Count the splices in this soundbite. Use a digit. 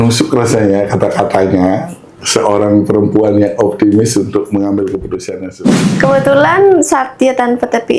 1